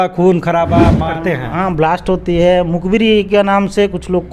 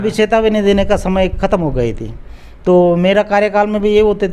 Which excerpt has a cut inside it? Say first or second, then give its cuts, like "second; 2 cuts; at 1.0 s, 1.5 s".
first; 1 cut; at 1.0 s